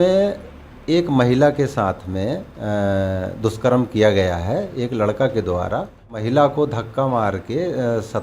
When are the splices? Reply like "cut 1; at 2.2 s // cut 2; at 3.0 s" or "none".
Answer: cut 1; at 6.2 s